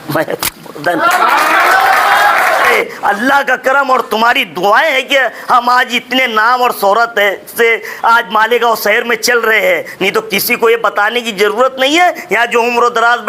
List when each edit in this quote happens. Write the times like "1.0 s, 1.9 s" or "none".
2.7 s